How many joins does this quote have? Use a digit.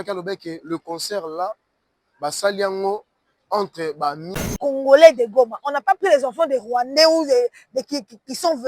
1